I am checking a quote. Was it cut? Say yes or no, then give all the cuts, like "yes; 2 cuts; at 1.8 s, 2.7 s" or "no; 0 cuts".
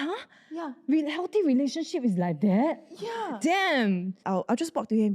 yes; 1 cut; at 4.2 s